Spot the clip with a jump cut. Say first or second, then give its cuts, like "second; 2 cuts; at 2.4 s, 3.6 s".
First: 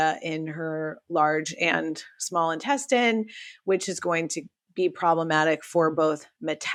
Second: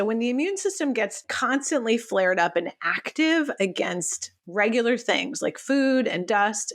second; 1 cut; at 1.3 s